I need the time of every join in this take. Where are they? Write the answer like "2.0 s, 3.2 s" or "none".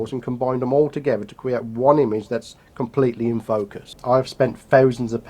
3.8 s